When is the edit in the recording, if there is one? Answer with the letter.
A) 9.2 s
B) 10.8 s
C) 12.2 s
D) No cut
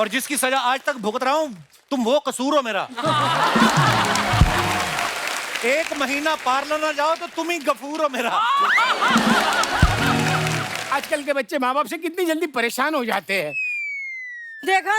B